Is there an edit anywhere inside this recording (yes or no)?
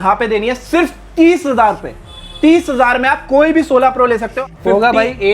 yes